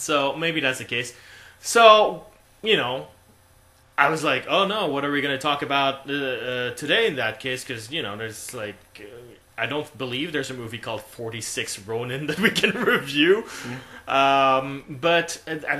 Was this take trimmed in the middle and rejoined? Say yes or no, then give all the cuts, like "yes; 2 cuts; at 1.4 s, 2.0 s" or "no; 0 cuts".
yes; 1 cut; at 3.7 s